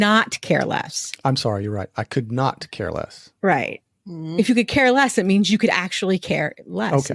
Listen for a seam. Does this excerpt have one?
no; 0 cuts

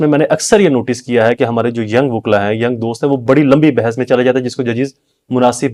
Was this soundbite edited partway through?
no; 0 cuts

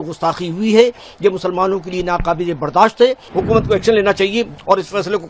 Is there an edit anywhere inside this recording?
yes; 1 cut; at 3.3 s

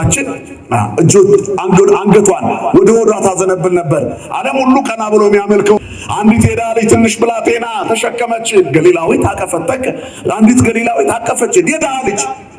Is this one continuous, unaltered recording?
no; 1 cut; at 5.8 s

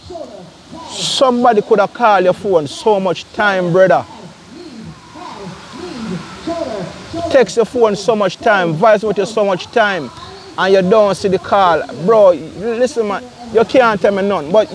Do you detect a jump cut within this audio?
no; 0 cuts

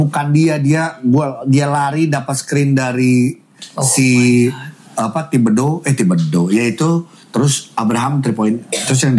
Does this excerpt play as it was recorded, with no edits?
yes; 0 cuts

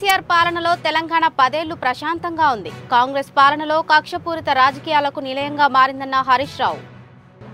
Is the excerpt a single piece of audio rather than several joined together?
yes; 0 cuts

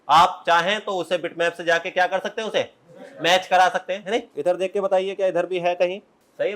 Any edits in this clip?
no; 0 cuts

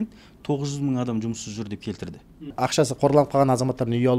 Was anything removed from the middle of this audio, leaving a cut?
yes; 1 cut; at 2.5 s

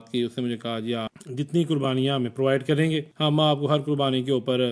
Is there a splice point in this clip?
yes; 2 cuts; at 1.1 s, 3.1 s

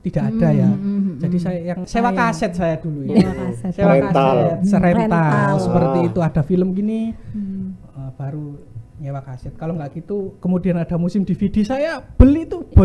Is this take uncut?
no; 1 cut; at 1.9 s

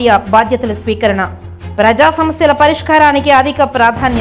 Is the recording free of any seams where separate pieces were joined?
yes; 0 cuts

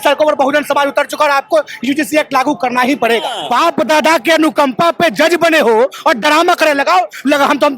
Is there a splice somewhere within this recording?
yes; 1 cut; at 3.4 s

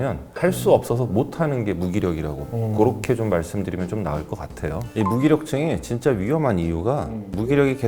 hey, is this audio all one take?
no; 1 cut; at 4.8 s

